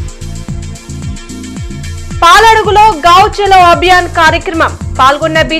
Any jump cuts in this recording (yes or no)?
yes